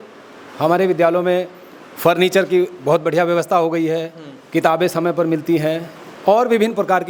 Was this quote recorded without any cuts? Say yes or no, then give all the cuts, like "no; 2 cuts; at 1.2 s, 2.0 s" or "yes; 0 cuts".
yes; 0 cuts